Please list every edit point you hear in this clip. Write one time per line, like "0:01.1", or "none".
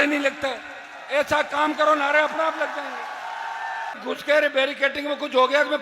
0:04.0